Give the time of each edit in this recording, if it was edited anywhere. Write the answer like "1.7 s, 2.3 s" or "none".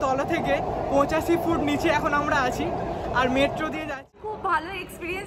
3.9 s